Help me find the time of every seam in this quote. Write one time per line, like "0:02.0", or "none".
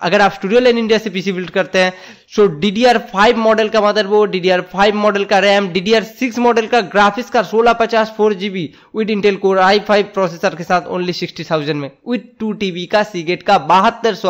none